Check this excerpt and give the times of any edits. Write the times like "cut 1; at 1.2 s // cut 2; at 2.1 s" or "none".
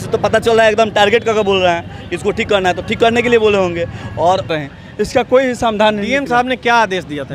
cut 1; at 4.5 s